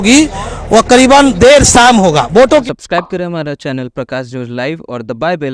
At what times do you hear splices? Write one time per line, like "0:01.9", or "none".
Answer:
0:02.7